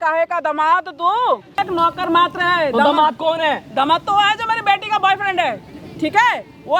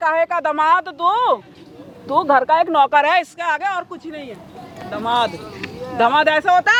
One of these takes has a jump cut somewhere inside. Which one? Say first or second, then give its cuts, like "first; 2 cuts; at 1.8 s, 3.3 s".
first; 1 cut; at 1.6 s